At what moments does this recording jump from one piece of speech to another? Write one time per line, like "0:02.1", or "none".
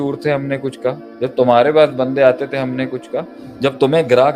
0:01.1
0:03.4